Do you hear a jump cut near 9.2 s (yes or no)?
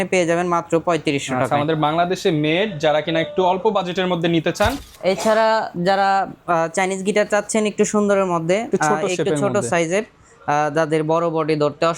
no